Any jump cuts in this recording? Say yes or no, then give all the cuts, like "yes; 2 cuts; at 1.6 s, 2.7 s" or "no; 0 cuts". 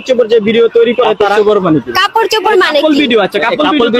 no; 0 cuts